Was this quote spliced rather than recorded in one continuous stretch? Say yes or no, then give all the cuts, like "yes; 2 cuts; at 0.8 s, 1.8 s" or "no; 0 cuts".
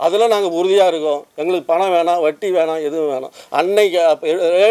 no; 0 cuts